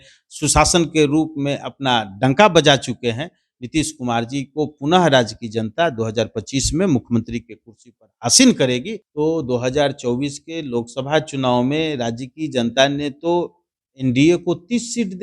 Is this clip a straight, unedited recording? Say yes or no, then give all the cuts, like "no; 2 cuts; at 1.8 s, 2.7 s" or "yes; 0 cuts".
no; 1 cut; at 9.0 s